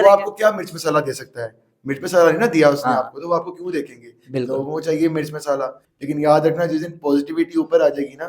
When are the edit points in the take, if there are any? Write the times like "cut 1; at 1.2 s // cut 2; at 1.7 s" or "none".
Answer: cut 1; at 5.9 s